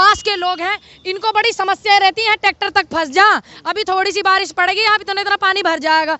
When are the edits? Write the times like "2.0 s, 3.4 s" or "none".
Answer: none